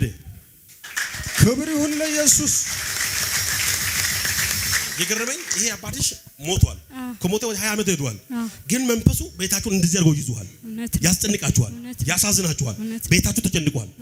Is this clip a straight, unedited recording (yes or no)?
yes